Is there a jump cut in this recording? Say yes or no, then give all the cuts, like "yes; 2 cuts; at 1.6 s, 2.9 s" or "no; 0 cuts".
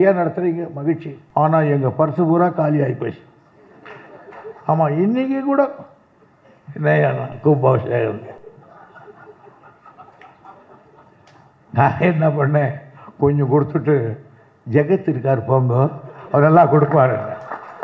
yes; 1 cut; at 1.1 s